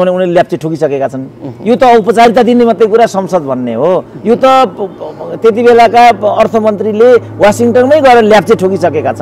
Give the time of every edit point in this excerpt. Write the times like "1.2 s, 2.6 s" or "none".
none